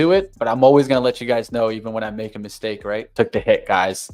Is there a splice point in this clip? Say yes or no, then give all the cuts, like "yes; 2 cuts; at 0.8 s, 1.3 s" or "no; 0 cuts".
yes; 1 cut; at 3.0 s